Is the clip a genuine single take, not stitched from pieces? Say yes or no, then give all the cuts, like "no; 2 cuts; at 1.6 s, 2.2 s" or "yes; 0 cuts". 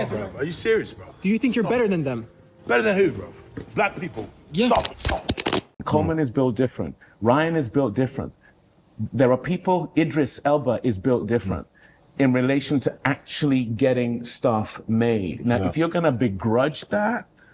no; 1 cut; at 5.7 s